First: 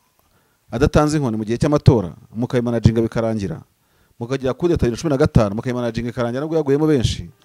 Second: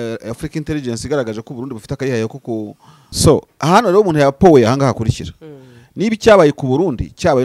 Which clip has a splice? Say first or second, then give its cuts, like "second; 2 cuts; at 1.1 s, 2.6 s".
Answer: second; 1 cut; at 3.0 s